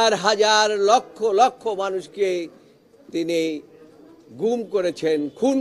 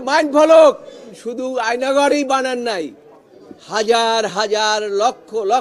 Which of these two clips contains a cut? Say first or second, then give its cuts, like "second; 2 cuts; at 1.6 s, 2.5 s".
second; 1 cut; at 1.2 s